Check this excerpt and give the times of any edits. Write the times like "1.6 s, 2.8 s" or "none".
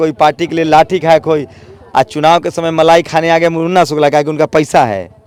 none